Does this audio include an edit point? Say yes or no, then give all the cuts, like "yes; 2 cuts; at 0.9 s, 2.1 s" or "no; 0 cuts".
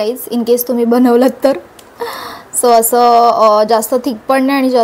no; 0 cuts